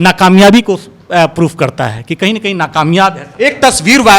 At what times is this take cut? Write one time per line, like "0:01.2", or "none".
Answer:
none